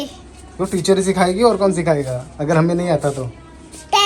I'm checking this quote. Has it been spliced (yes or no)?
no